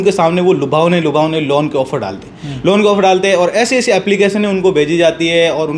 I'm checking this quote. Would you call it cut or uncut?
uncut